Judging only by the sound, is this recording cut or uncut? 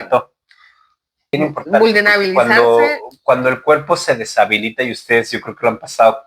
cut